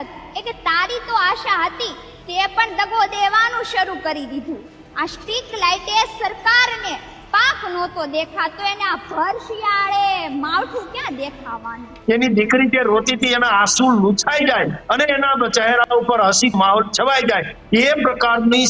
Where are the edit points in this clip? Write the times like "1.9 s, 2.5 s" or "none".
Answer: 11.9 s